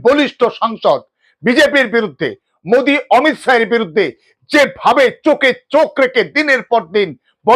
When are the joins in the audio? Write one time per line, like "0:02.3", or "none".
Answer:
none